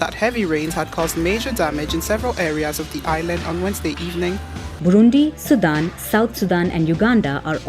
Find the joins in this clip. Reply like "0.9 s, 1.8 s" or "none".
4.8 s